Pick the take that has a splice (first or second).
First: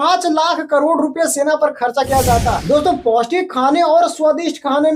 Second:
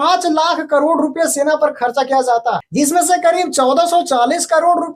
first